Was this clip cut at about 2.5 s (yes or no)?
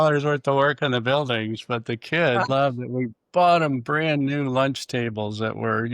yes